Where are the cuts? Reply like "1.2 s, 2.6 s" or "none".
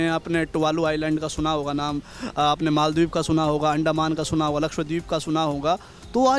none